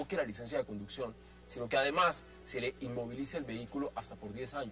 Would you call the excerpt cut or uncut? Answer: uncut